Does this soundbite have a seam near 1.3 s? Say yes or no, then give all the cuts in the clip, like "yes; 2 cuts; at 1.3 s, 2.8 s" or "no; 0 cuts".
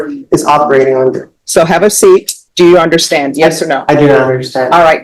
yes; 2 cuts; at 1.3 s, 2.4 s